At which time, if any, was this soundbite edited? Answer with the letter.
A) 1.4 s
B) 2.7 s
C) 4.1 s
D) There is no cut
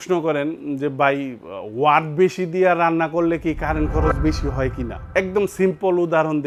D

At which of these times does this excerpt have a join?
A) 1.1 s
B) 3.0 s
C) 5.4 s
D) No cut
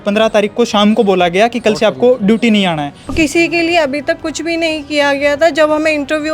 B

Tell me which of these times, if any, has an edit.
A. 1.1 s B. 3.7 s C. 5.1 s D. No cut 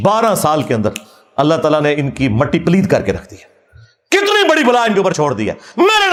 D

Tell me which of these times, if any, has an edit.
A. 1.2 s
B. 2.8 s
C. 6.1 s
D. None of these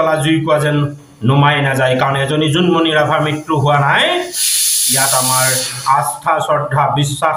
D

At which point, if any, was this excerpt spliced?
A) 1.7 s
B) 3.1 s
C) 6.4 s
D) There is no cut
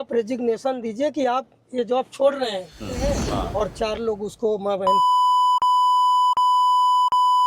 B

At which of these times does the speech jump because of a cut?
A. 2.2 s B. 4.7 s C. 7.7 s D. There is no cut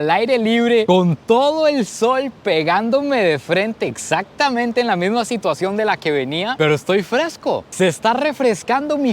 C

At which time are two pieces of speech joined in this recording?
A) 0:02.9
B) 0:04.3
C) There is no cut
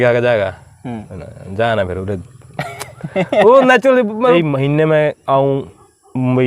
B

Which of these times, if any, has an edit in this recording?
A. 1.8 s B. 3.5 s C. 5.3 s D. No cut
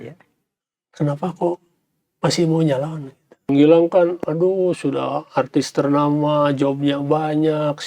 B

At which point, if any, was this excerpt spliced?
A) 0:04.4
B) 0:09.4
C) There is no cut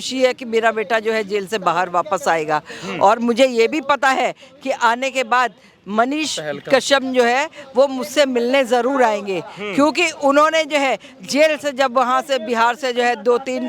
C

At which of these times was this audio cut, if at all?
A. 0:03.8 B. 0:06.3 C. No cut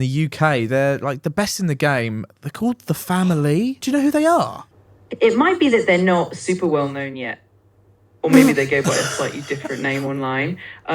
A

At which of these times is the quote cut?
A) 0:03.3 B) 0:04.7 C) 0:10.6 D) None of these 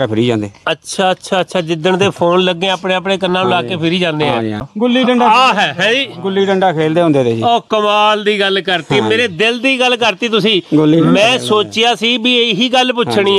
B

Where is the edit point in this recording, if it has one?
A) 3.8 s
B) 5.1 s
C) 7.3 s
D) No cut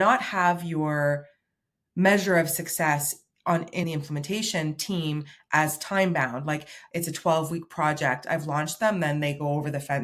A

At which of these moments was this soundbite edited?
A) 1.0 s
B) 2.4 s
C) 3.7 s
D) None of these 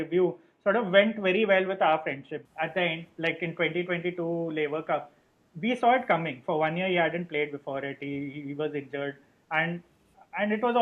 B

